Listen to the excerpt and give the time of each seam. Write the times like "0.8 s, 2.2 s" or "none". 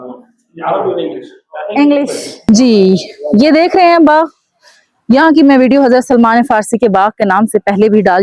2.4 s